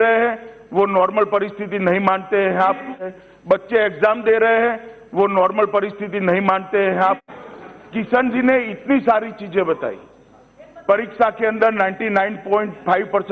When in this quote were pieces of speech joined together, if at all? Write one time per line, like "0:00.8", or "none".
0:03.1
0:07.3